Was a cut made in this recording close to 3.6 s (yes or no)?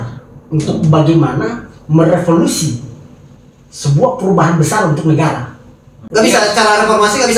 no